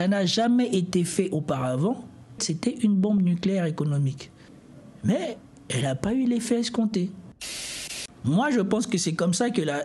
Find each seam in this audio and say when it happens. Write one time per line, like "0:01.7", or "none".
0:02.5
0:07.8